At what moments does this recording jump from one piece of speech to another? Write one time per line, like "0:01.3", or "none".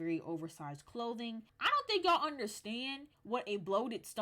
0:01.5

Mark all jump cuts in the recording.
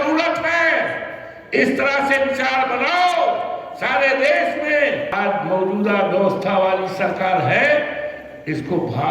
0:05.1

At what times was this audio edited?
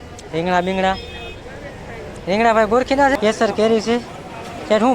0:03.2

